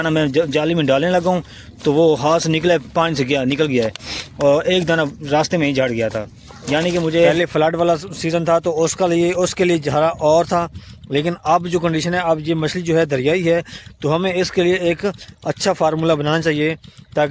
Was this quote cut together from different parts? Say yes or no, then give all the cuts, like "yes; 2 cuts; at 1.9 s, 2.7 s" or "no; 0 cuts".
yes; 1 cut; at 7.3 s